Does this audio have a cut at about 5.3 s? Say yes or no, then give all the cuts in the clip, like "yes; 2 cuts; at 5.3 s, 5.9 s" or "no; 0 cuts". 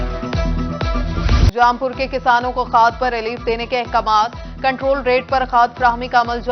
no; 1 cut; at 1.5 s